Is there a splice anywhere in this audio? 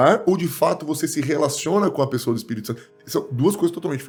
no; 0 cuts

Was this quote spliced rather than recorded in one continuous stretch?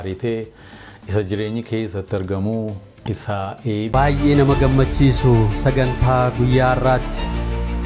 yes; 1 cut; at 3.9 s

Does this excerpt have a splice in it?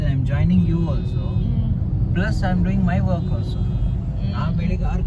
no; 0 cuts

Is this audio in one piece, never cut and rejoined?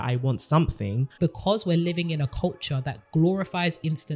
no; 1 cut; at 1.1 s

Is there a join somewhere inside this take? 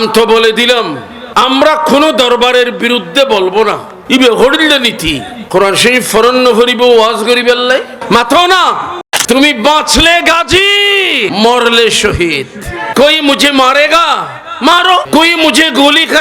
yes; 1 cut; at 8.9 s

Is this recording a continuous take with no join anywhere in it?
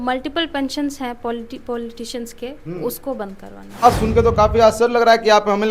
no; 1 cut; at 3.8 s

